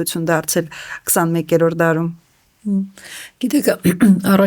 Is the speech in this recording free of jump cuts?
yes; 0 cuts

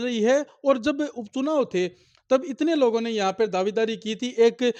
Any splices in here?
no; 0 cuts

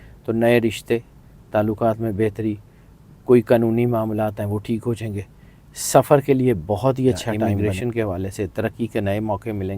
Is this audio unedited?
no; 1 cut; at 7.5 s

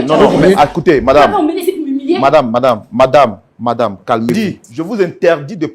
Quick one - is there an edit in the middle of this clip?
yes; 1 cut; at 4.3 s

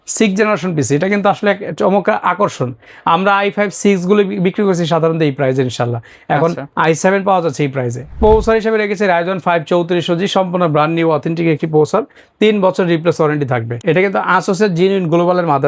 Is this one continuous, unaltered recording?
no; 2 cuts; at 8.2 s, 13.7 s

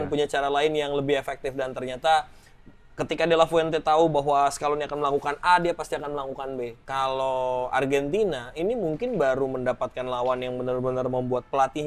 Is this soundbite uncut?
no; 1 cut; at 6.8 s

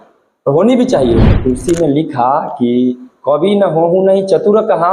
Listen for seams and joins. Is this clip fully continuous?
no; 1 cut; at 1.3 s

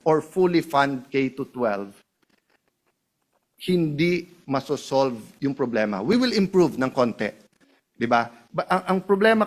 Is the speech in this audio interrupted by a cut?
no; 0 cuts

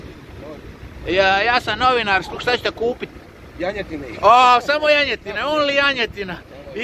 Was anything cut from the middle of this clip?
yes; 1 cut; at 2.3 s

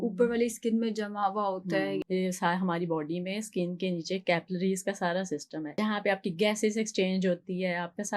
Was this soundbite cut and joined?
yes; 2 cuts; at 2.0 s, 5.6 s

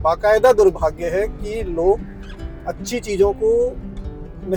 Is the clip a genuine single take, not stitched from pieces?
yes; 0 cuts

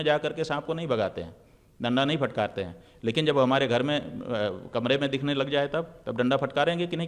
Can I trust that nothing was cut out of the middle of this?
yes; 0 cuts

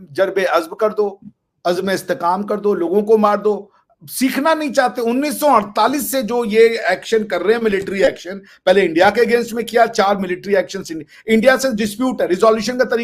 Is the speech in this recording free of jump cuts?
yes; 0 cuts

